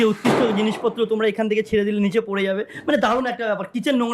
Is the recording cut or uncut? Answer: uncut